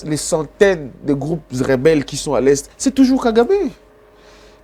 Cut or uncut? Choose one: uncut